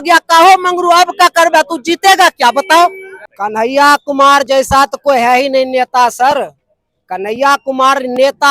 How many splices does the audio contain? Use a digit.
1